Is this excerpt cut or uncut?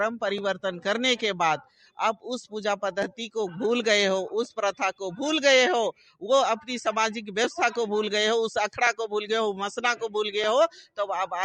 uncut